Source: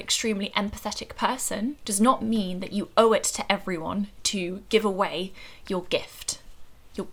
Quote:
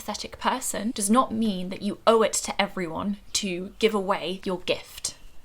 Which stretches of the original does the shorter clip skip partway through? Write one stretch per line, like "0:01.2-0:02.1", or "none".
0:01.8-0:01.9
0:05.3-0:05.6